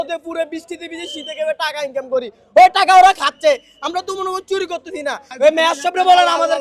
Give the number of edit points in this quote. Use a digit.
1